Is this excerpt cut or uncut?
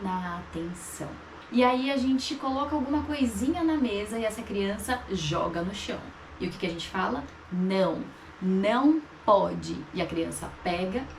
cut